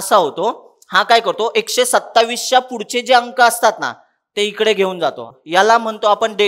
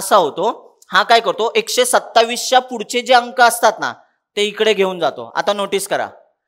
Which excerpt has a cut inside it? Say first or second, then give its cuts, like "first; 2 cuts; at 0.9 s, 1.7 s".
first; 1 cut; at 5.3 s